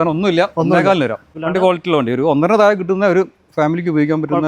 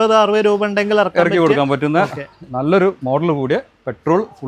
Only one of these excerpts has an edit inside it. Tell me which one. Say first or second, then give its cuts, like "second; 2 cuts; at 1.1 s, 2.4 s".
first; 1 cut; at 1.3 s